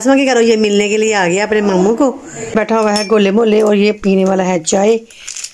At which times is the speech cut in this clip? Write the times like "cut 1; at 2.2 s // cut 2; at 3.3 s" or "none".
cut 1; at 2.5 s